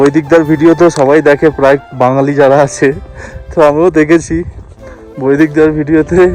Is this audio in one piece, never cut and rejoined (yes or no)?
yes